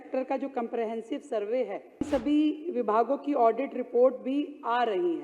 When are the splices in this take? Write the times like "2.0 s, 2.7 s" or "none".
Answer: 2.1 s